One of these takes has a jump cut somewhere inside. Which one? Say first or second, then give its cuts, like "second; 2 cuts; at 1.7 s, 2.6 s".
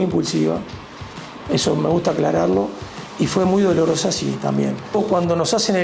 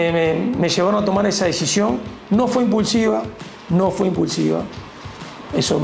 first; 1 cut; at 4.9 s